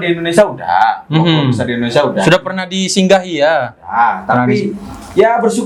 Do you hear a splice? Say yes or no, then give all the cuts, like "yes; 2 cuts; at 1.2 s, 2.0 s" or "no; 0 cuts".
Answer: no; 0 cuts